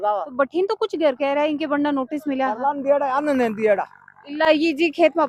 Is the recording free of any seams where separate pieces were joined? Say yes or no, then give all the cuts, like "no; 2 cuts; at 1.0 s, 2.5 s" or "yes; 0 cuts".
yes; 0 cuts